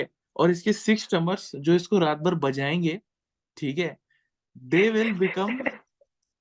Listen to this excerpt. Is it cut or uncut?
uncut